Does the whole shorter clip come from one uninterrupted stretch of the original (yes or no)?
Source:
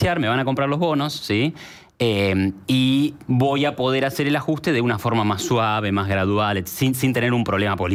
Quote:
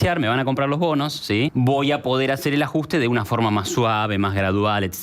no